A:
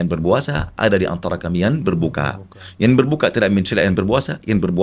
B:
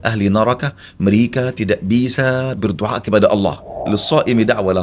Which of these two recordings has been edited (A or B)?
B